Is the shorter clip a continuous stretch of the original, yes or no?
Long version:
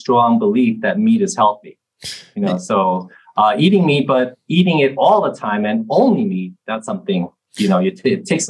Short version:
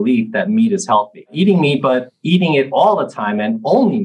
no